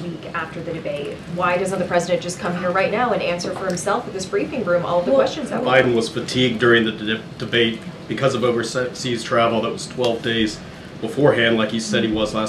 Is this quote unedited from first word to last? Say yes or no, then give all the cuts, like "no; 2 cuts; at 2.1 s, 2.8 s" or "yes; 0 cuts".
no; 1 cut; at 5.6 s